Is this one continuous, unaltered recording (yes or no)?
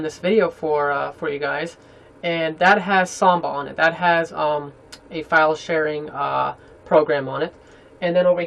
no